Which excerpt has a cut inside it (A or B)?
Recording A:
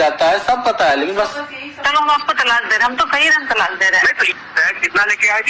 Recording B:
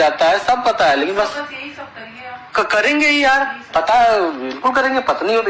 A